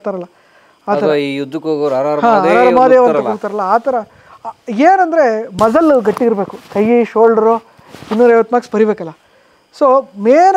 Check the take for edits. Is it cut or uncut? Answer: uncut